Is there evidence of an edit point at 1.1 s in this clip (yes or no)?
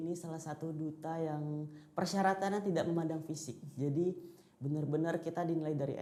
no